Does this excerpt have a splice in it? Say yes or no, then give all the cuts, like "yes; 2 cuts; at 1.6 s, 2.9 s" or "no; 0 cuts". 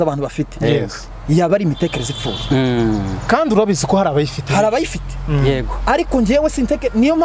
no; 0 cuts